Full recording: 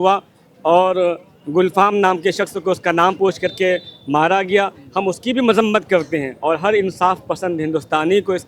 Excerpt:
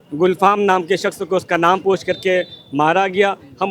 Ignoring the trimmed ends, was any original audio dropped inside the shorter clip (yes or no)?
no